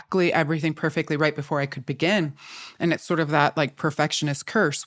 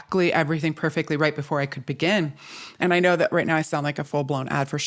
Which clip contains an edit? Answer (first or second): second